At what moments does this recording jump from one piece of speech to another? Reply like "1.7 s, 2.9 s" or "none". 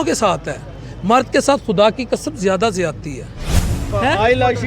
3.7 s